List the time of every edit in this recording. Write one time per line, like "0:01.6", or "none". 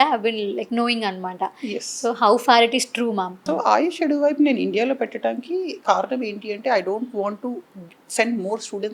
0:03.4